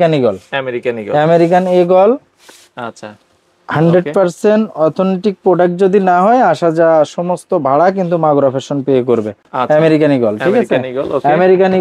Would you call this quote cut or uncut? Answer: uncut